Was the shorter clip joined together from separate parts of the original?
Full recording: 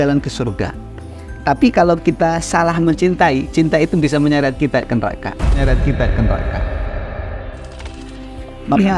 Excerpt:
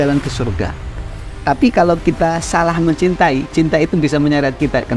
no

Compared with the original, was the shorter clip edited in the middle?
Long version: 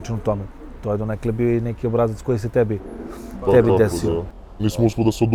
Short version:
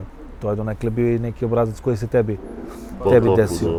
no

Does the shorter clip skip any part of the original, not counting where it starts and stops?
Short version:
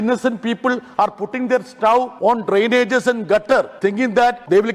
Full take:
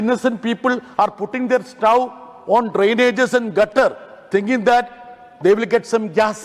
yes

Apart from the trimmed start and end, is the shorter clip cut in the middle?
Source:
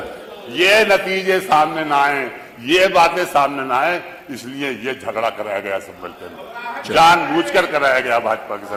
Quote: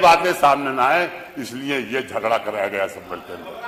no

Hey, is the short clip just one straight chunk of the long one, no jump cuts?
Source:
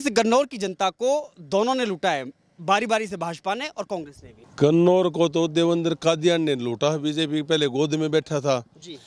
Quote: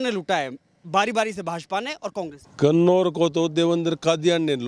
no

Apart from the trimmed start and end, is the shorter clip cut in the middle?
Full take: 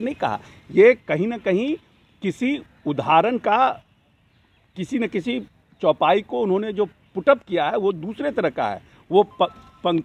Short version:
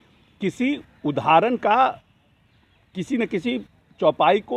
no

